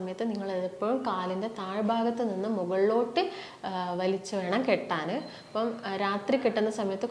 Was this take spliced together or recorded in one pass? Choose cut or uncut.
uncut